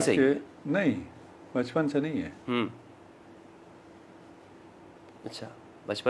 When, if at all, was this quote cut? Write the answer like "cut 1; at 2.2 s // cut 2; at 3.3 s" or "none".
none